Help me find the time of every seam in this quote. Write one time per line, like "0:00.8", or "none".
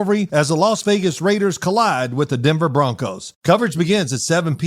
0:03.3